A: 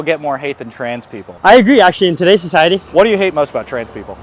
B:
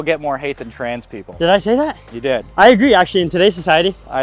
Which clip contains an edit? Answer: A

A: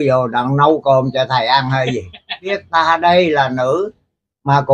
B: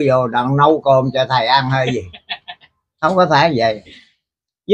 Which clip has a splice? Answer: A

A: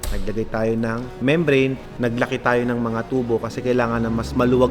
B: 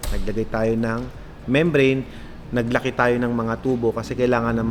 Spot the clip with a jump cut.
A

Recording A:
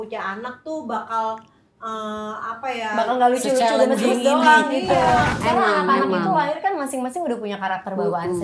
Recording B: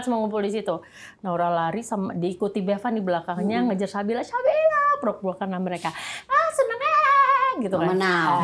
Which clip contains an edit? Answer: A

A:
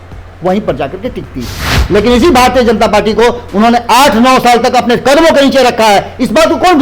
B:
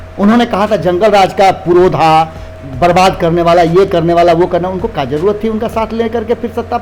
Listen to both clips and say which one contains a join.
A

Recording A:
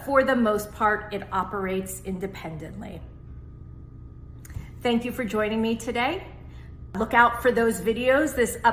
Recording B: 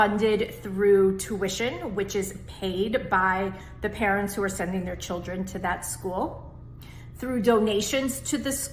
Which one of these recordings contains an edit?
A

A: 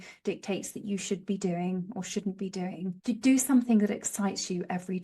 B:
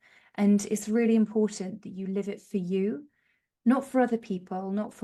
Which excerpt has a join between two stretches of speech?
A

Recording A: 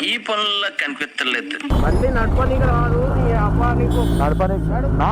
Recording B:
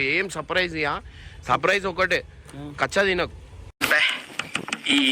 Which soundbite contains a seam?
A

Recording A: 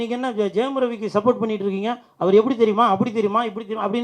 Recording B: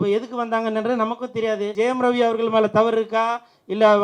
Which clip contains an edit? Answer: B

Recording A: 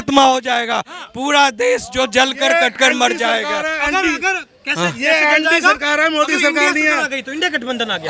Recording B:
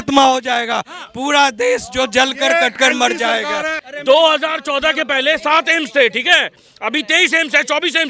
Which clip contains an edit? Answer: B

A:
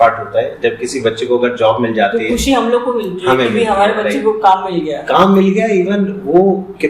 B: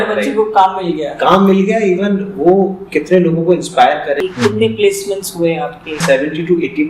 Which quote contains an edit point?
B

